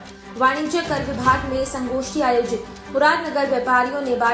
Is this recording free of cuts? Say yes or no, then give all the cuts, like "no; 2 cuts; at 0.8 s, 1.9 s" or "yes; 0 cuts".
yes; 0 cuts